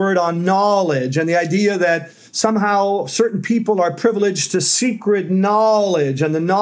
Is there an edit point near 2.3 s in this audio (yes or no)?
no